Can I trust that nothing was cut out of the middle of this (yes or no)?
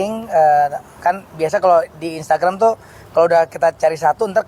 yes